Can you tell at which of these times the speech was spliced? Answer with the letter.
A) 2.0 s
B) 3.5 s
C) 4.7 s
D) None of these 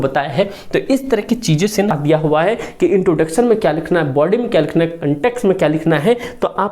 A